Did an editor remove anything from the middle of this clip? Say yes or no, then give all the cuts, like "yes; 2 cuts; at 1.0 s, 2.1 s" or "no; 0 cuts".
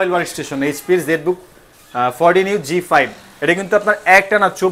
no; 0 cuts